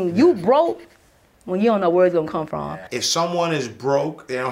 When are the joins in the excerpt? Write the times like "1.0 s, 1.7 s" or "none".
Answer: 2.9 s